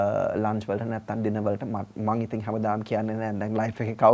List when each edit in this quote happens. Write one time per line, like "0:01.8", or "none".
none